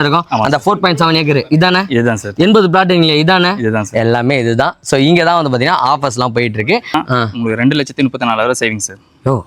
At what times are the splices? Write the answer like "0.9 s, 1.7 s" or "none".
6.9 s

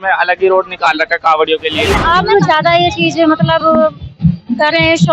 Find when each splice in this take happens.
1.9 s

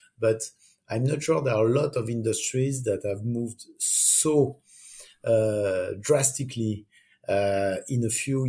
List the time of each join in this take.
none

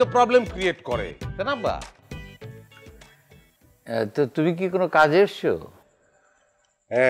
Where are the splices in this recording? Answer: none

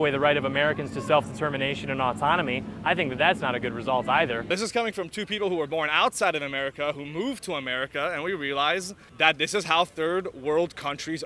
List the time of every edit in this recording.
4.4 s, 9.0 s

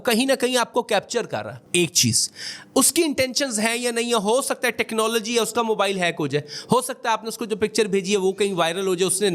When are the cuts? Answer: none

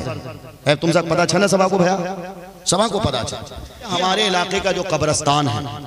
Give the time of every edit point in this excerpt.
3.9 s

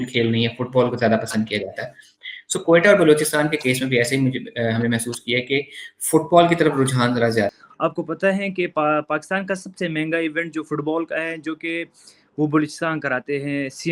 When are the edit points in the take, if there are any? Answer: 7.5 s

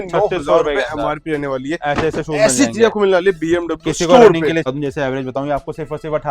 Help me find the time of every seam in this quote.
4.7 s

